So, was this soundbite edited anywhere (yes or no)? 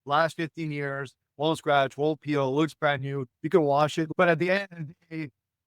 yes